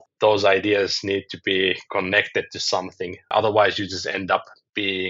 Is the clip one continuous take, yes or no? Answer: no